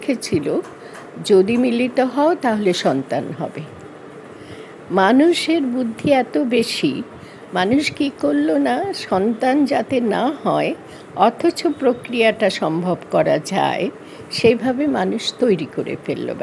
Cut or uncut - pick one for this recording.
uncut